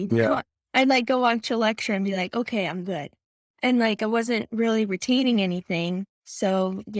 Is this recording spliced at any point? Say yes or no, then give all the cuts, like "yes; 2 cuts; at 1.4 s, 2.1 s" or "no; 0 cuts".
no; 0 cuts